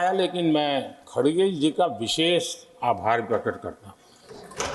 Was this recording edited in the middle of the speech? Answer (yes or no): no